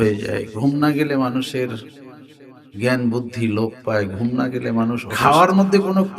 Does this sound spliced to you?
yes; 1 cut; at 5.1 s

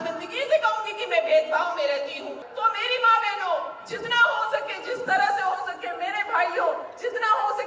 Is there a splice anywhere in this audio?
yes; 1 cut; at 2.4 s

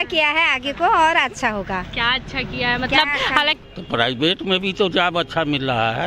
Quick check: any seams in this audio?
yes; 1 cut; at 3.6 s

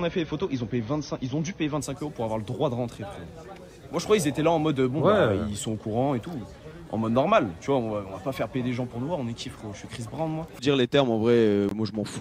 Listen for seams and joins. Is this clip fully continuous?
no; 1 cut; at 10.6 s

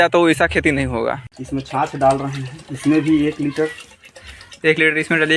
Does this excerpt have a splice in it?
yes; 1 cut; at 1.3 s

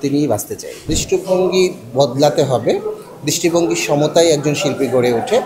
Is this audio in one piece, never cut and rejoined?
no; 1 cut; at 0.9 s

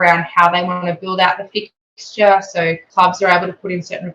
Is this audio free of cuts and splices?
no; 1 cut; at 2.8 s

